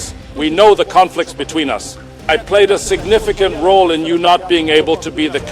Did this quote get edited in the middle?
no; 0 cuts

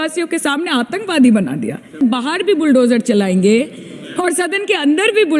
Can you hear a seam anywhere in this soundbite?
yes; 1 cut; at 2.0 s

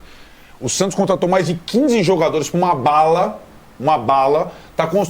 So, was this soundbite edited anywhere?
yes; 1 cut; at 3.4 s

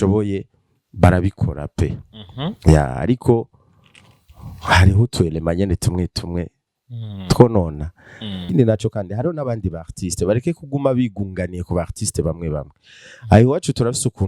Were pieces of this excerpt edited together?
yes; 1 cut; at 8.5 s

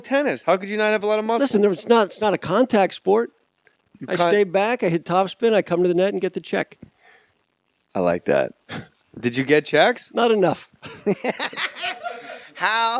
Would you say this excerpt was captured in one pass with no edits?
no; 1 cut; at 3.5 s

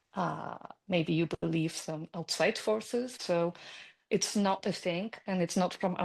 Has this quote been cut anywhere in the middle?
yes; 1 cut; at 3.2 s

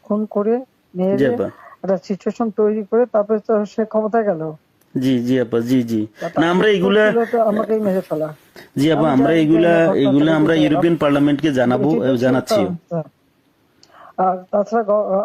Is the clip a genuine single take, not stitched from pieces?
yes; 0 cuts

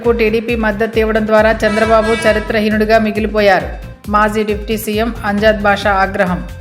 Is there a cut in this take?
no; 0 cuts

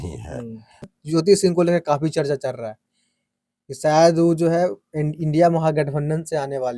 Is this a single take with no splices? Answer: no; 1 cut; at 1.0 s

